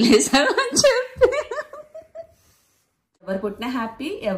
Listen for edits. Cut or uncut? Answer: cut